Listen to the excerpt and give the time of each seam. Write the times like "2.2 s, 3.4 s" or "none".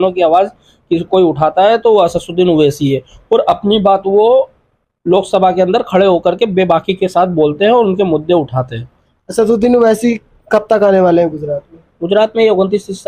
none